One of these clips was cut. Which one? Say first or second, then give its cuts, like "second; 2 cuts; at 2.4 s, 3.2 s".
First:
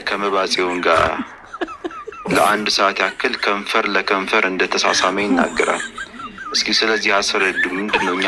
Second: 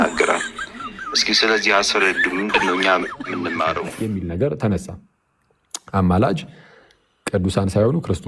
second; 1 cut; at 3.9 s